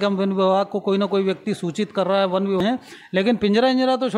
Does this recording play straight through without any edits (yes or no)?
no